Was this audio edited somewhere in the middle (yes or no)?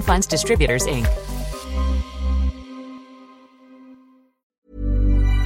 yes